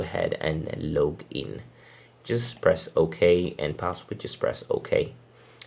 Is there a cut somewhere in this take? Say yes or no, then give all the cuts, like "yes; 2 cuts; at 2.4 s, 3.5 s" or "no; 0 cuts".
no; 0 cuts